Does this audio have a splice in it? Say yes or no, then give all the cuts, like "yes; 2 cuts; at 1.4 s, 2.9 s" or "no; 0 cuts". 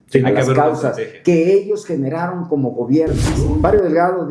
yes; 1 cut; at 3.3 s